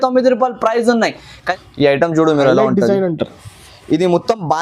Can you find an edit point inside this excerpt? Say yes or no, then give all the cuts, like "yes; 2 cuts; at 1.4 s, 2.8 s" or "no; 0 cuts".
yes; 1 cut; at 1.3 s